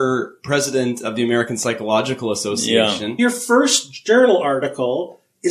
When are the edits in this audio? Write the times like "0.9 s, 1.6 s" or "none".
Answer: 3.1 s